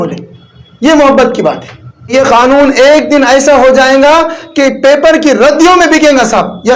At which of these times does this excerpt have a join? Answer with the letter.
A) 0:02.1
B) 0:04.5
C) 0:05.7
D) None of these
A